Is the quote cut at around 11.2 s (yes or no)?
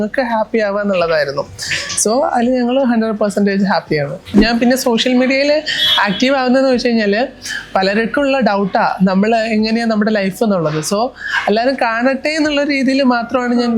no